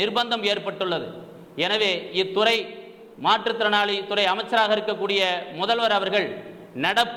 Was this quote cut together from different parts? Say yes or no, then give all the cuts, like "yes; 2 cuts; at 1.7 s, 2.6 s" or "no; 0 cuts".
no; 0 cuts